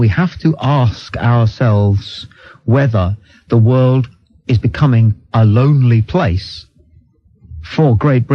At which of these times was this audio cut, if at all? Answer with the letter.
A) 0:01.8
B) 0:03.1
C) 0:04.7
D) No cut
D